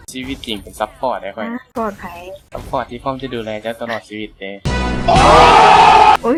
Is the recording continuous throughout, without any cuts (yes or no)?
yes